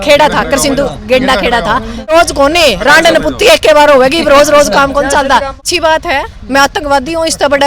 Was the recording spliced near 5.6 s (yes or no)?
yes